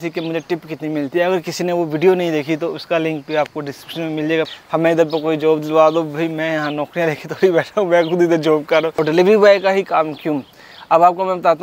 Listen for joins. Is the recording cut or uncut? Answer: cut